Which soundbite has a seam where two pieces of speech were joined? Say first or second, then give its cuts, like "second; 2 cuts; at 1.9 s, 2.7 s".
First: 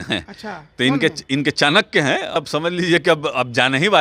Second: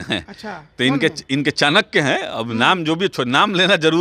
first; 1 cut; at 2.3 s